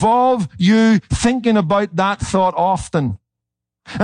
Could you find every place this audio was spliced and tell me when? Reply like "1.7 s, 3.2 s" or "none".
none